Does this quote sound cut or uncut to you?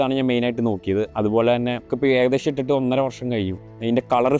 cut